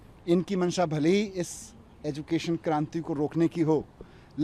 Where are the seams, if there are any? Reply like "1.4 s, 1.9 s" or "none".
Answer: none